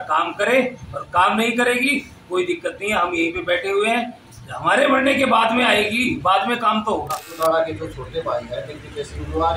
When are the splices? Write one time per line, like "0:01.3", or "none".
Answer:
0:07.2